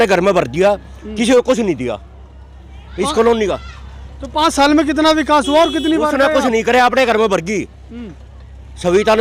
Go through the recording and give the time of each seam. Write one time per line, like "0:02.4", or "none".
none